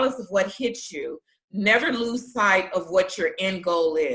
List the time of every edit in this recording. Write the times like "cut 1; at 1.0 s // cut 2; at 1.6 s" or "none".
none